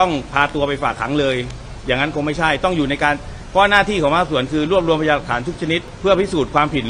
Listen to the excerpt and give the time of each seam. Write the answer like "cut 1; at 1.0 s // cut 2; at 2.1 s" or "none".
cut 1; at 5.9 s